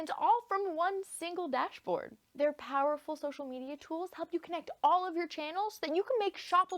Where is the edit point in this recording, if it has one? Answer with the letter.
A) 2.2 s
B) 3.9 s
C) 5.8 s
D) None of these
A